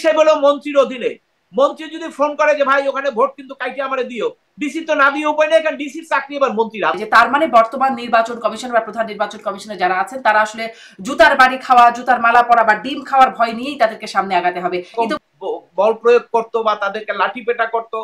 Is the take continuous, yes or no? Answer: no